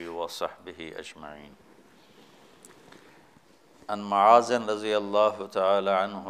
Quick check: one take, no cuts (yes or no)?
yes